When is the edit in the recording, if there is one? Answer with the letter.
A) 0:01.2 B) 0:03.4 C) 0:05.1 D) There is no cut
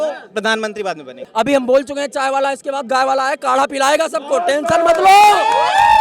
A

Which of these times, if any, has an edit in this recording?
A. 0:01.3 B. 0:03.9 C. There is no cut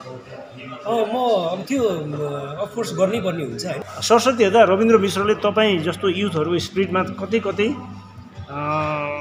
B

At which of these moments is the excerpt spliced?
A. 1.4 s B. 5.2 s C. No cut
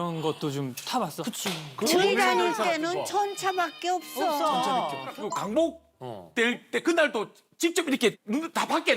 B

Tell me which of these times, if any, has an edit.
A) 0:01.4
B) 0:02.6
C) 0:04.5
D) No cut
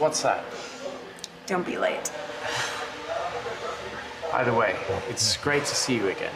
B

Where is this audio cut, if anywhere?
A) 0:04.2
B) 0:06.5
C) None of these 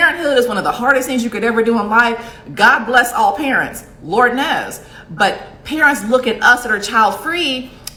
C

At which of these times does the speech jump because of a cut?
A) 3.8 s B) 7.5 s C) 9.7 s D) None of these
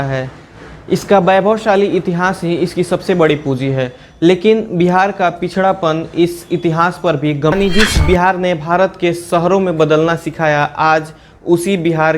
B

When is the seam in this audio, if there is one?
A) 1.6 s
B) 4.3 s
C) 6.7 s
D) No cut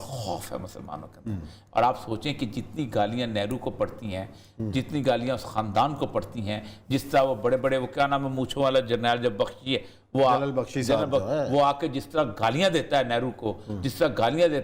A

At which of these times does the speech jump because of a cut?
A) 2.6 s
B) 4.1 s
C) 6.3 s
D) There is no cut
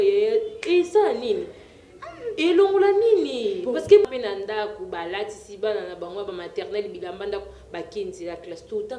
B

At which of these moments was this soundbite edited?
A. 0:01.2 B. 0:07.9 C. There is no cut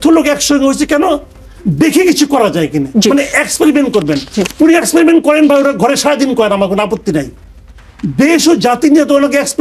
C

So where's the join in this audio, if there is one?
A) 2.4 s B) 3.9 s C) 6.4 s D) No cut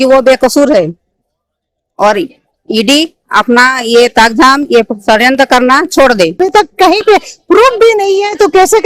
C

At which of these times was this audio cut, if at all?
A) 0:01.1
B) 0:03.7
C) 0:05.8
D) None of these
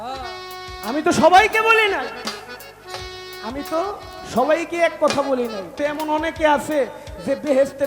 C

